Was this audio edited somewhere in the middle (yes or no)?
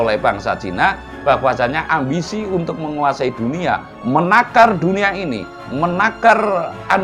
no